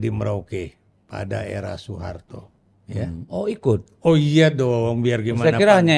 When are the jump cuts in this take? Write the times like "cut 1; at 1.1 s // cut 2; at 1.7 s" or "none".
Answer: none